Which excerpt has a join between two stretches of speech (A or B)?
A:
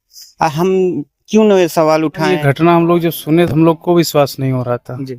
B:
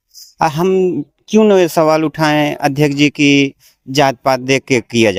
A